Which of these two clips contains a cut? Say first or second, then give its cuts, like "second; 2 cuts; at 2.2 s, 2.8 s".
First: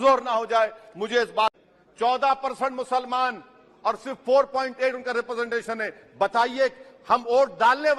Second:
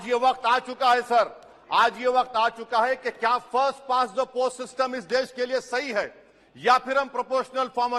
first; 1 cut; at 1.6 s